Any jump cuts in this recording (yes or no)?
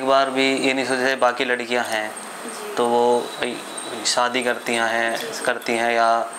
no